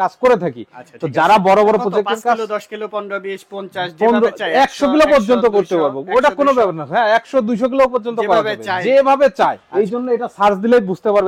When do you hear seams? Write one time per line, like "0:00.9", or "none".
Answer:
0:09.6